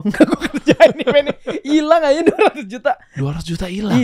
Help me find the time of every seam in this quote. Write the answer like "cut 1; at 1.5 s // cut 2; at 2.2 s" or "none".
none